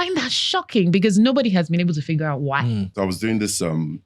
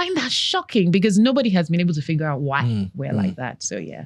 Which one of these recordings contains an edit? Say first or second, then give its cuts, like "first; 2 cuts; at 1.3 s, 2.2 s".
first; 1 cut; at 2.9 s